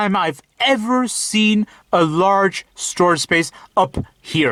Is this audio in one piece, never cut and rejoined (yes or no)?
yes